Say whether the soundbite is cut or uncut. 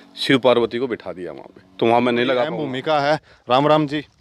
cut